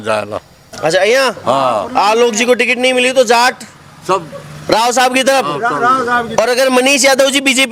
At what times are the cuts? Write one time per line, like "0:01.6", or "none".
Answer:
none